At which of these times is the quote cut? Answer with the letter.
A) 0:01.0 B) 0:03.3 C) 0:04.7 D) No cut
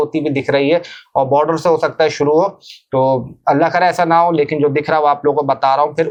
D